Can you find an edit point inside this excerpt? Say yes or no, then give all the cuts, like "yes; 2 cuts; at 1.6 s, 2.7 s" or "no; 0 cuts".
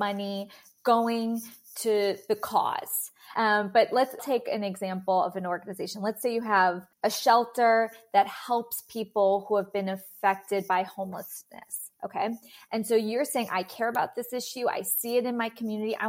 yes; 3 cuts; at 3.3 s, 4.2 s, 6.9 s